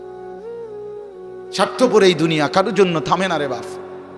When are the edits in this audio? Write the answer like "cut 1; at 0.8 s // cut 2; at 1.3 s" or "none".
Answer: none